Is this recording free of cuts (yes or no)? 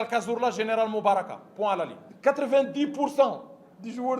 no